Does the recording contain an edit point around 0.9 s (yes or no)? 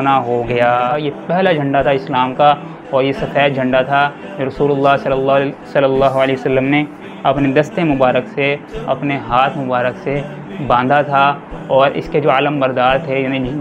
yes